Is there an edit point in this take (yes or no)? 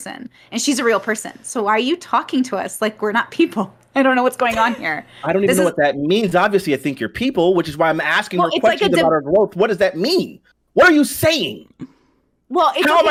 no